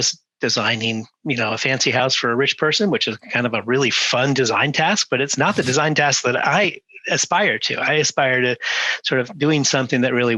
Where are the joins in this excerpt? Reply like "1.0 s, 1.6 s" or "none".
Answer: none